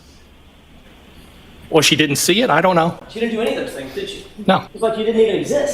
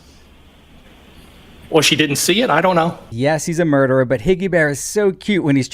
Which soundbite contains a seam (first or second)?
first